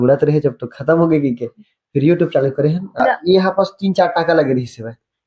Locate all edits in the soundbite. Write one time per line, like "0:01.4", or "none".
0:02.9